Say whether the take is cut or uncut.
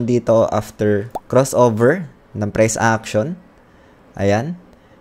cut